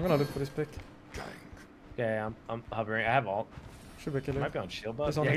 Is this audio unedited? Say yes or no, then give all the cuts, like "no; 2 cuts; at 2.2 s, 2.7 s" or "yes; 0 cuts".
yes; 0 cuts